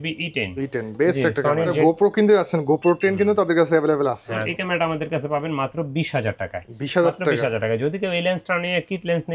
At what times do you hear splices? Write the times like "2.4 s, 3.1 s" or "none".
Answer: 1.8 s, 4.5 s